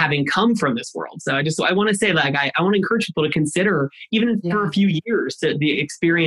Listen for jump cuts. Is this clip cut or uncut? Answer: uncut